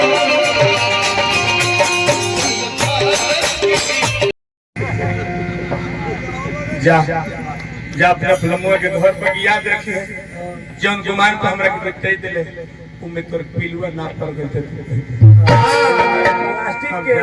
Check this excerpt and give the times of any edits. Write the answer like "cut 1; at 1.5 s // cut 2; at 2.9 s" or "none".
cut 1; at 4.3 s

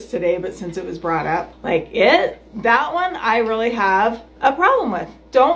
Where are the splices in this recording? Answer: cut 1; at 1.5 s // cut 2; at 4.3 s

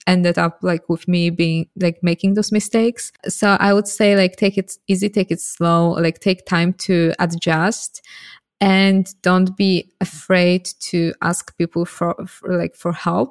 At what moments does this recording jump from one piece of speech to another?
cut 1; at 3.2 s

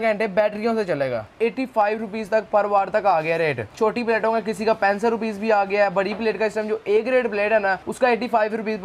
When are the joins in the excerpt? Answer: cut 1; at 1.3 s // cut 2; at 3.6 s // cut 3; at 7.9 s

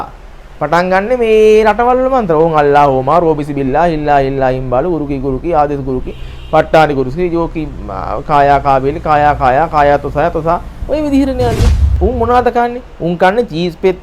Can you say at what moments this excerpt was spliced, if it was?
cut 1; at 11.9 s

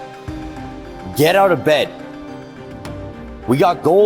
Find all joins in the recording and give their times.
none

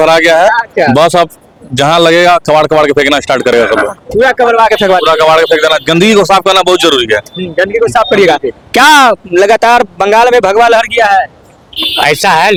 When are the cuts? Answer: none

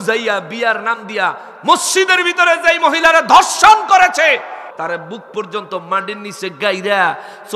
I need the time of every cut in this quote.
cut 1; at 4.7 s

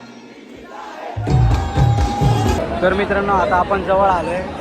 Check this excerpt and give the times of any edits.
cut 1; at 2.6 s

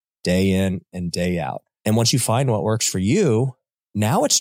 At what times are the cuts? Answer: cut 1; at 1.6 s

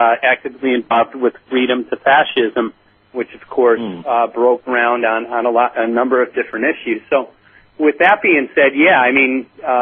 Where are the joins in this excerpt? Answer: cut 1; at 1.4 s

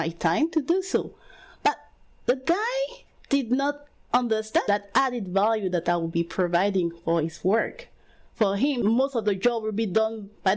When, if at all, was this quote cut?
cut 1; at 4.7 s // cut 2; at 8.8 s

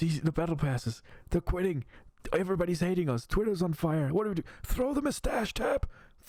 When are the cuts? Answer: none

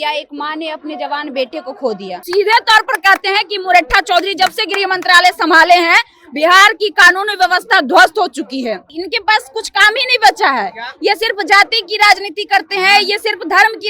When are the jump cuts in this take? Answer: cut 1; at 2.2 s // cut 2; at 9.0 s

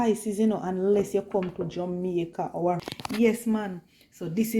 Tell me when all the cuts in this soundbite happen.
cut 1; at 2.9 s

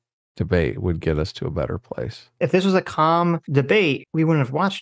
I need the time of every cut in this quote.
cut 1; at 2.4 s // cut 2; at 3.9 s

